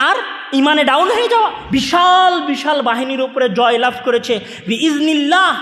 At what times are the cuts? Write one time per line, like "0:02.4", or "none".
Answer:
0:01.6

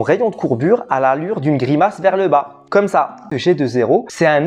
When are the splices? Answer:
0:03.3

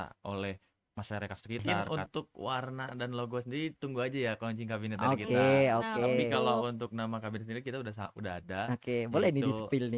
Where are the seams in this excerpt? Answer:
0:01.9

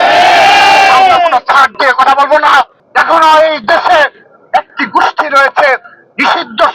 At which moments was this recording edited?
0:02.8

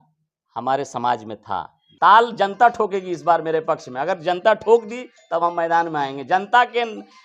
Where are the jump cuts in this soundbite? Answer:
0:01.8

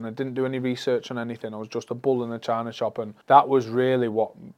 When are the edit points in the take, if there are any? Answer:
0:03.1

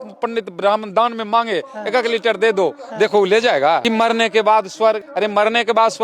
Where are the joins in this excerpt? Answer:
0:03.8
0:05.1

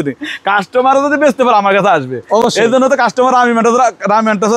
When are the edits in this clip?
none

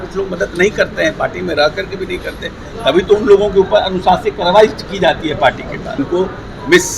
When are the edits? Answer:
0:05.9

